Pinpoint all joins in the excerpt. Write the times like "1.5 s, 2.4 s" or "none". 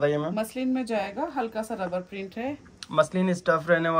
none